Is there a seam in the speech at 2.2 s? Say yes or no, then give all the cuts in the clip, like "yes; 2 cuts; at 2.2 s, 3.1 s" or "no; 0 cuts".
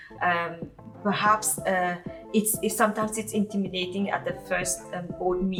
no; 0 cuts